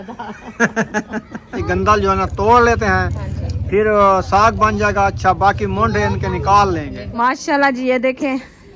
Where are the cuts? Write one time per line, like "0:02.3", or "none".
0:01.6
0:07.0